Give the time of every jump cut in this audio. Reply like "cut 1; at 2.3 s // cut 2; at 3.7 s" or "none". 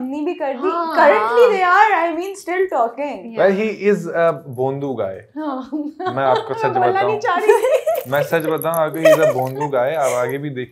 none

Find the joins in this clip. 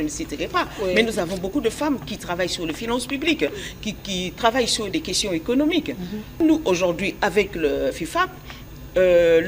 cut 1; at 6.4 s

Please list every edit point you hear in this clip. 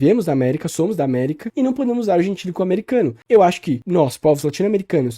cut 1; at 1.4 s // cut 2; at 3.2 s // cut 3; at 3.8 s

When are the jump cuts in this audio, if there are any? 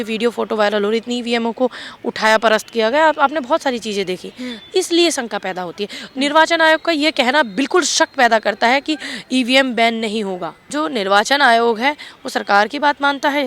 cut 1; at 10.7 s

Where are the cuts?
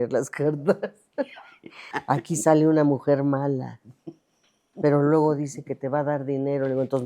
cut 1; at 1.9 s

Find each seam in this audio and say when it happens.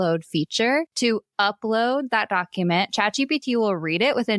cut 1; at 0.9 s

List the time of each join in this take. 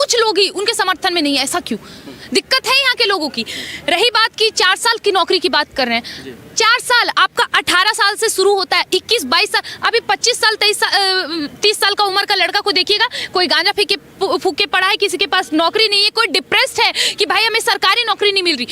none

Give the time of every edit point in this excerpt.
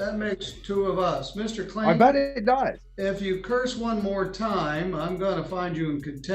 cut 1; at 2.9 s

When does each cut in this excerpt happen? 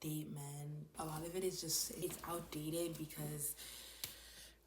cut 1; at 0.9 s // cut 2; at 2.0 s

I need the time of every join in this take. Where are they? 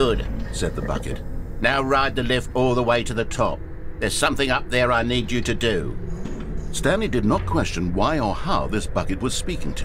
none

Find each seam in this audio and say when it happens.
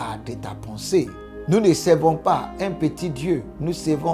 cut 1; at 1.3 s

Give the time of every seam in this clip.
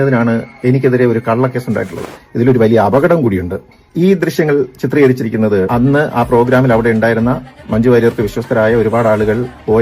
cut 1; at 2.0 s

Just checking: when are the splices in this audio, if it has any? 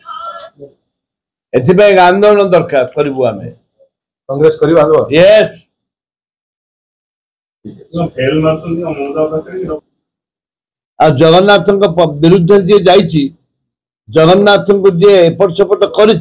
cut 1; at 9.6 s

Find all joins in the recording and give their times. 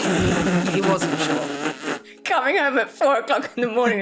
cut 1; at 2.1 s

